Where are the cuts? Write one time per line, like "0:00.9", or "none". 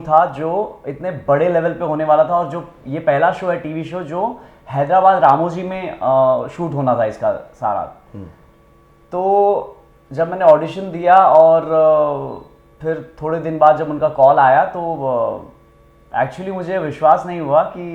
none